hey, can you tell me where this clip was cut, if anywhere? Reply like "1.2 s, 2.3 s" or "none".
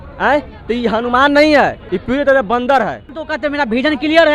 1.8 s, 3.2 s